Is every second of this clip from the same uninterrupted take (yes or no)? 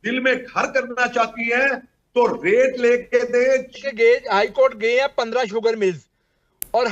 no